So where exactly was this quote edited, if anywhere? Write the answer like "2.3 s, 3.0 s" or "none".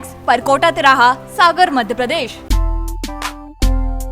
2.4 s